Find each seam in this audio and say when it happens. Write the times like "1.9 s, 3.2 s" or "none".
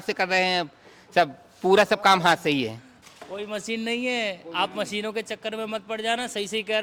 none